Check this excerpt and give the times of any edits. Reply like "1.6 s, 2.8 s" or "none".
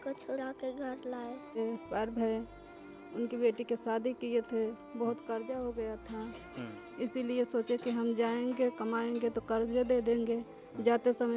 1.6 s